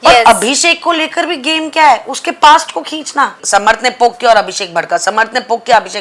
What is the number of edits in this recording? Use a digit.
1